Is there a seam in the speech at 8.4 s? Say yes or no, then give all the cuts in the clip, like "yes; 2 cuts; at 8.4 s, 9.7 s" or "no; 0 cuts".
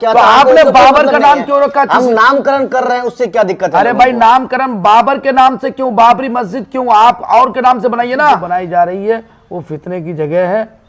yes; 1 cut; at 8.4 s